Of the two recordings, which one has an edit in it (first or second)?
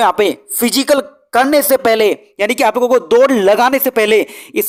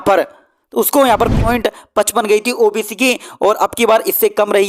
second